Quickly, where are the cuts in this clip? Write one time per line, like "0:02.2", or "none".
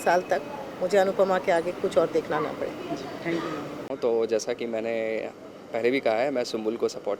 0:03.9